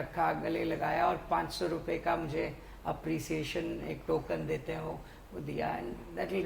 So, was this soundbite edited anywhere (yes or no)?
no